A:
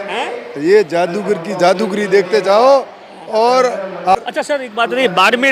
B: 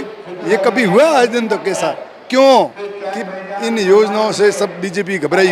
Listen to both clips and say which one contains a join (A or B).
A